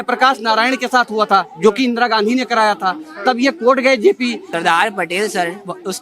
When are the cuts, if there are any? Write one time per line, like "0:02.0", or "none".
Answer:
0:04.4